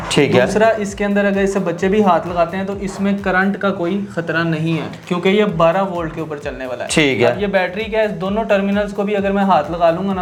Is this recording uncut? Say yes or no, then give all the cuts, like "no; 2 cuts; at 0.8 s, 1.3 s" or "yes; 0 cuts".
yes; 0 cuts